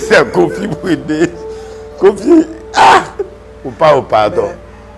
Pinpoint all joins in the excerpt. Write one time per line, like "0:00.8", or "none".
none